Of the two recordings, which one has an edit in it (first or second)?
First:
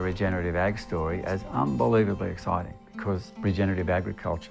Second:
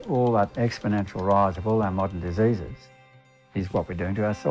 first